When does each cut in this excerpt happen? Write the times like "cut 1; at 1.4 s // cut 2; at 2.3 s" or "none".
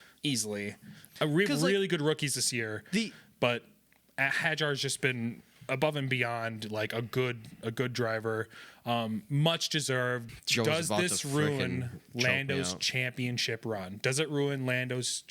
cut 1; at 10.3 s